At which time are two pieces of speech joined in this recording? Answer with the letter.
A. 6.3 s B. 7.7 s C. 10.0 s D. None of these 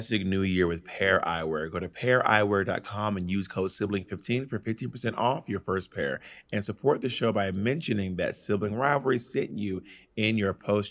D